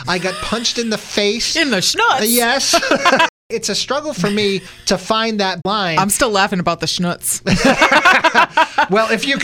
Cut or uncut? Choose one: cut